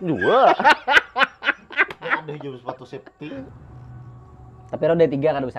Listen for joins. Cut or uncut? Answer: cut